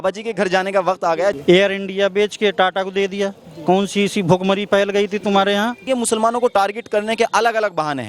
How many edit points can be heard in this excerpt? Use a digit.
2